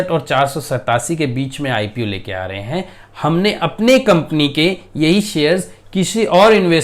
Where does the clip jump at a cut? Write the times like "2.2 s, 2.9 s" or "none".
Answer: none